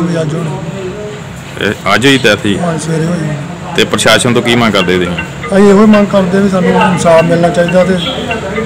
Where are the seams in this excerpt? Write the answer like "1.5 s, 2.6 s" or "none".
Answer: none